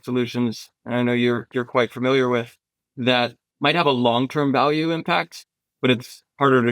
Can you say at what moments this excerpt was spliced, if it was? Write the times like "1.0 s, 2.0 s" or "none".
3.4 s